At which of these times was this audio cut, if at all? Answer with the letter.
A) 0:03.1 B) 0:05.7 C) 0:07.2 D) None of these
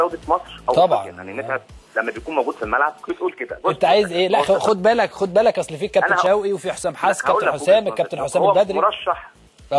D